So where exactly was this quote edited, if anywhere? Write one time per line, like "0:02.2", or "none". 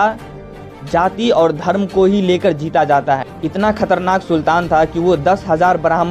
0:03.4